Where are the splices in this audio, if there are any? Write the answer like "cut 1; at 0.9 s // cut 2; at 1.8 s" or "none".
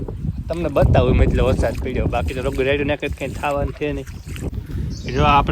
cut 1; at 4.5 s